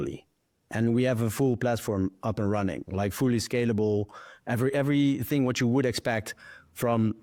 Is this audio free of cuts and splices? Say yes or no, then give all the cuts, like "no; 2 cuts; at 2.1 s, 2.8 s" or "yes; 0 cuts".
yes; 0 cuts